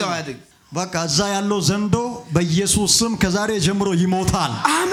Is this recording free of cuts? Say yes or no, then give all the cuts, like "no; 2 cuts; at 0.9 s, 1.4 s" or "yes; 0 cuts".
yes; 0 cuts